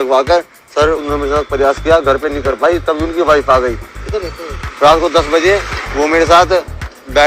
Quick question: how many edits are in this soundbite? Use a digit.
1